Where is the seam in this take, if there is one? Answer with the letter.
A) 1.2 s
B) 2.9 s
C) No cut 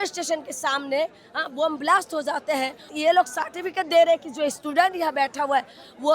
B